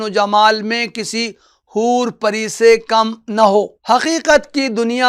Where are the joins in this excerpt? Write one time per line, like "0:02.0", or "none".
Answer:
0:03.8